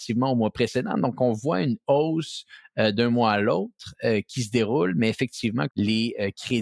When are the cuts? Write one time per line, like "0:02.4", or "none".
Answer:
0:05.7